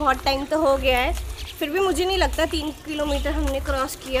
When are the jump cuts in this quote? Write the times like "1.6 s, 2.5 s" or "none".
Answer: none